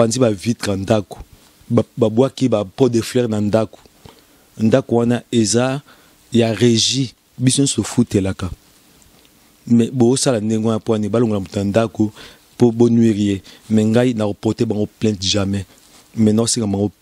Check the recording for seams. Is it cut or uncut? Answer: uncut